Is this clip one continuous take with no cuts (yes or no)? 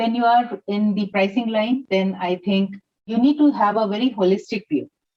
no